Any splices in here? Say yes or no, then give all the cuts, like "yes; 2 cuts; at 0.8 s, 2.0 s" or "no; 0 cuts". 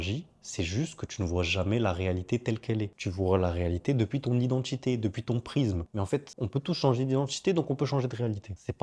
no; 0 cuts